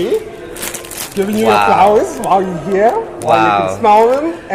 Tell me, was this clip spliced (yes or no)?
no